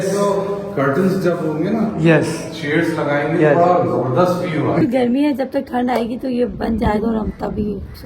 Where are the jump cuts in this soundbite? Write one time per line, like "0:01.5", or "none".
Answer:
0:04.8